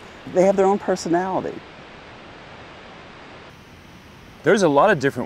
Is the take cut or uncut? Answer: uncut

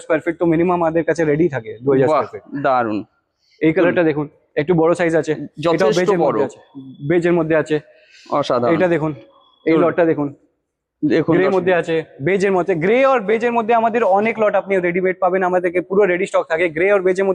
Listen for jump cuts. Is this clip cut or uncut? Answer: uncut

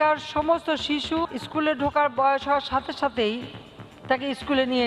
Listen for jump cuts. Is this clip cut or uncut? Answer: cut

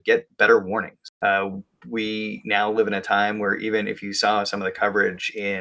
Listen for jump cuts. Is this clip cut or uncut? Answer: cut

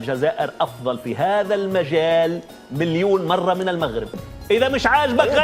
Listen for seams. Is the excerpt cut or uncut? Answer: cut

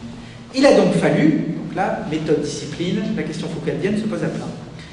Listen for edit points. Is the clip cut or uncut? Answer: uncut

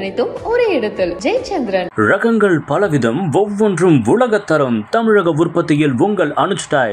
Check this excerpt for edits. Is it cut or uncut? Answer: uncut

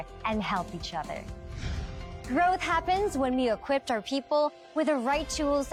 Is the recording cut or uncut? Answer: uncut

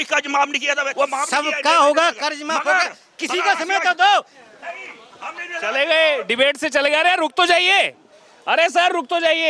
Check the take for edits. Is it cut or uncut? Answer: cut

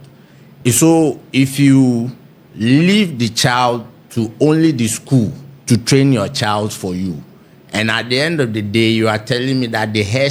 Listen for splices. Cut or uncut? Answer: uncut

